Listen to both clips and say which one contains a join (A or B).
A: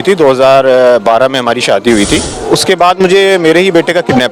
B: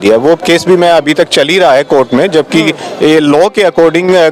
A